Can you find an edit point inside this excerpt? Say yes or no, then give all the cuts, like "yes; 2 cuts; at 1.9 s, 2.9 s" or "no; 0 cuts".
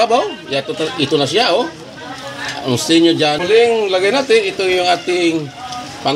yes; 1 cut; at 3.4 s